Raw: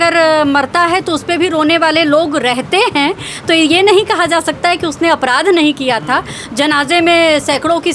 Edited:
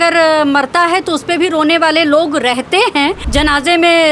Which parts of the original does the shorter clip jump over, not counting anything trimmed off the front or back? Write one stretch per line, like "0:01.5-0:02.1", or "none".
0:03.2-0:06.5